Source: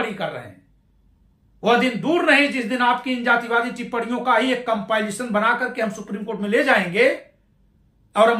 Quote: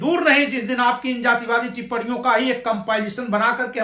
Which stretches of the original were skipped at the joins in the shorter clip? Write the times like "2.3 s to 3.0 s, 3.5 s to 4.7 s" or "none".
none